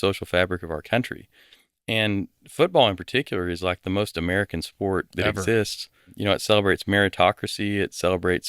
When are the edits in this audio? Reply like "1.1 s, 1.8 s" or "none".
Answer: 6.1 s